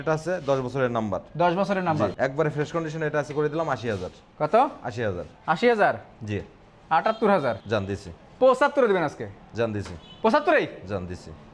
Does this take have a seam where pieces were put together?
no; 0 cuts

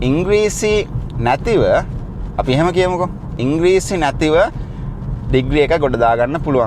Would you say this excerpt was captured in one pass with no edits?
yes; 0 cuts

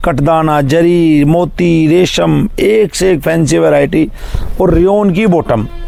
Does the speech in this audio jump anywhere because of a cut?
no; 0 cuts

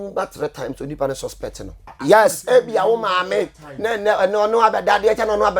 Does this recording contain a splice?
yes; 1 cut; at 1.9 s

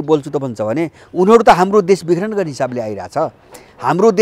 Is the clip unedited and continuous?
yes; 0 cuts

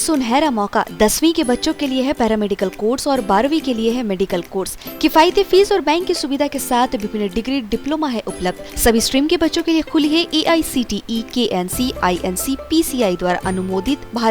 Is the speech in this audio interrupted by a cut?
no; 0 cuts

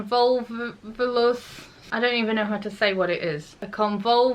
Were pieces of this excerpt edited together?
no; 0 cuts

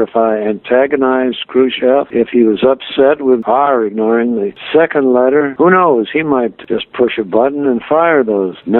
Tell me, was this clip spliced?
yes; 2 cuts; at 3.4 s, 6.6 s

